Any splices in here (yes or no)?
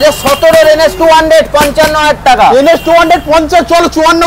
no